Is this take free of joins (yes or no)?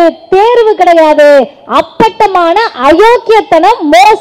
yes